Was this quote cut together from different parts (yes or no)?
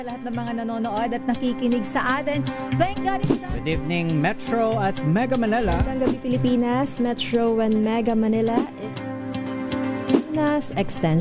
no